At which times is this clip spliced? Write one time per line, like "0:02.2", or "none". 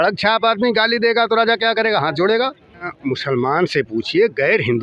0:02.9